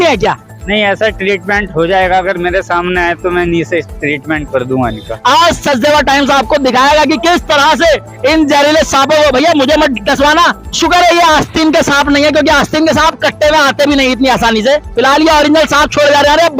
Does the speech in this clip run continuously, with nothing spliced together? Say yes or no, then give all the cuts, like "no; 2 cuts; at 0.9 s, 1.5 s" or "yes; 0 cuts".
no; 3 cuts; at 5.1 s, 10.7 s, 14.9 s